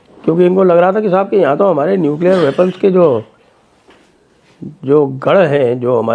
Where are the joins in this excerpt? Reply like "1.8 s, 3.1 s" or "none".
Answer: none